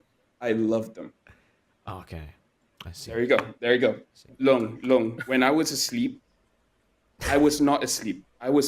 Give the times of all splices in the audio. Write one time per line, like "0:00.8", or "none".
0:04.1